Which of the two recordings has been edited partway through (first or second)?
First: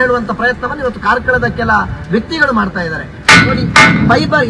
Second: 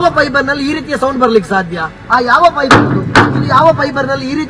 first